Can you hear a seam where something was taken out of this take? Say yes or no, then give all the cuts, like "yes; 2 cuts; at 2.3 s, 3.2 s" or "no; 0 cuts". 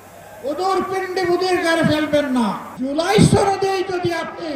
yes; 1 cut; at 2.7 s